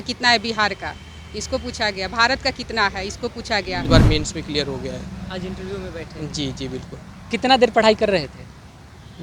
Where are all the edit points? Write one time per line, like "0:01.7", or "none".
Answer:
0:03.8